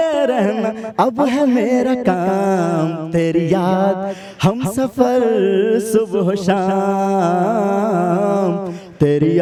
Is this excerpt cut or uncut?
uncut